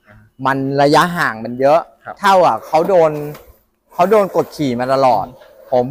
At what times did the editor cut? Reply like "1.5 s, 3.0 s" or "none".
none